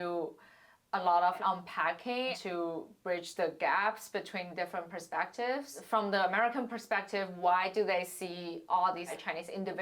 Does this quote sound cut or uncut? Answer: cut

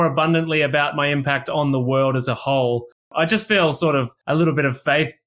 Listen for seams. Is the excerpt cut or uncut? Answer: cut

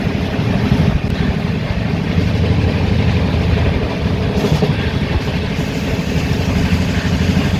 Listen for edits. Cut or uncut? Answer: uncut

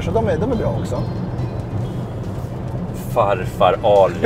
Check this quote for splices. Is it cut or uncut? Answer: uncut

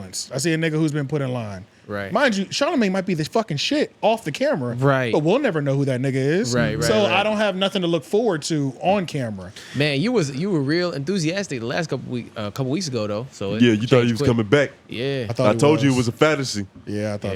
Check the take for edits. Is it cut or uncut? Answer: uncut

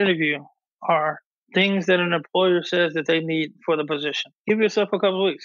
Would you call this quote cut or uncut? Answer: cut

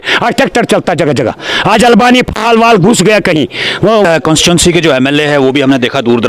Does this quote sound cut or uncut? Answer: cut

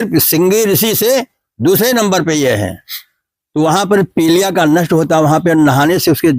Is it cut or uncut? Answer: uncut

